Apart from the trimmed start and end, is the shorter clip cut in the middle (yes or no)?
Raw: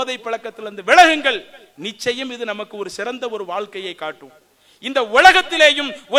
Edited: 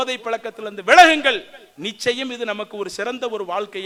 no